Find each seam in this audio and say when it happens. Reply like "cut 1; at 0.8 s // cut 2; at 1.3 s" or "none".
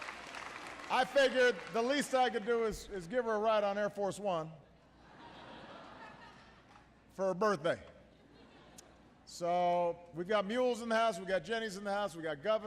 cut 1; at 11.8 s

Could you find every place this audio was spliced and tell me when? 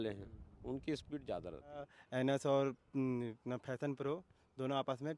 cut 1; at 2.0 s

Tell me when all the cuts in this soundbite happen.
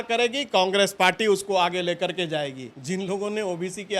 cut 1; at 2.7 s

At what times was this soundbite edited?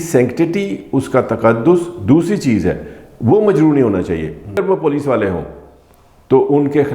cut 1; at 4.6 s

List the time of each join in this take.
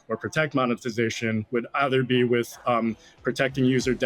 none

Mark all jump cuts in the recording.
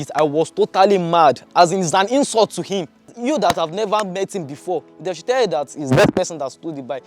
cut 1; at 3.1 s

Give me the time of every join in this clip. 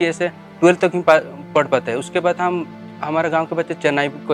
none

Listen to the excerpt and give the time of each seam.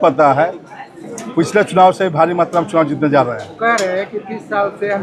none

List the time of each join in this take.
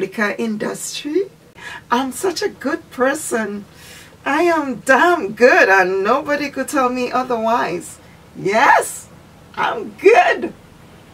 cut 1; at 1.7 s

